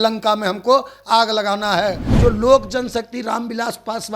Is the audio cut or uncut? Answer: cut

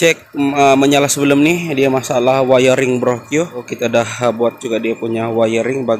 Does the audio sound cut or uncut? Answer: cut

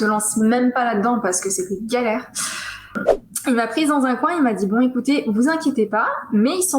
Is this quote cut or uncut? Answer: cut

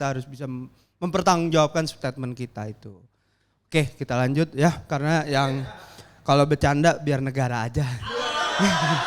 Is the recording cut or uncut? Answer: uncut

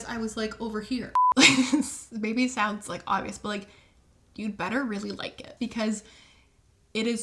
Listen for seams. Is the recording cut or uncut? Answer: cut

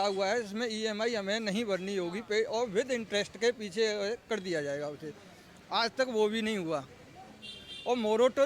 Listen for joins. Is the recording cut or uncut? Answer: uncut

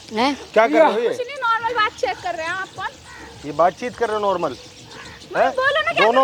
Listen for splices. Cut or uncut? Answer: uncut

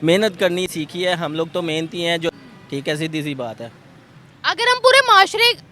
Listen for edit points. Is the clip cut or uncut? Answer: cut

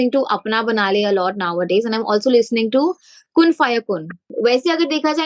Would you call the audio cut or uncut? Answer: cut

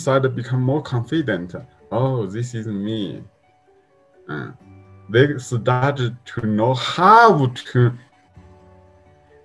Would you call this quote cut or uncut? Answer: uncut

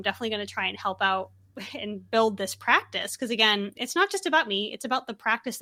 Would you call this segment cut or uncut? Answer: uncut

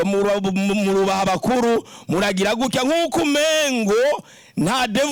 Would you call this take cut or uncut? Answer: uncut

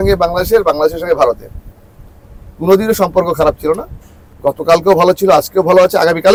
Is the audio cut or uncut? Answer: uncut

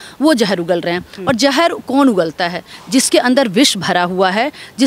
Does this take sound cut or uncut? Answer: uncut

